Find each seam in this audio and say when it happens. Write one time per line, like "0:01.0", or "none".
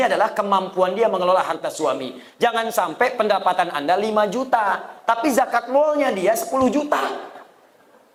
none